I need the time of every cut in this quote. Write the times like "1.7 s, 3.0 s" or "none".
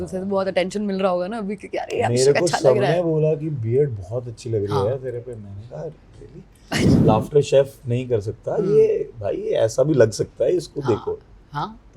6.9 s